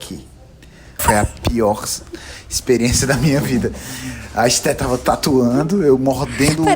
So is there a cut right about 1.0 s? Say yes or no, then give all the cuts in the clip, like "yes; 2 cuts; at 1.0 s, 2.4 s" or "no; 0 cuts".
yes; 1 cut; at 1.0 s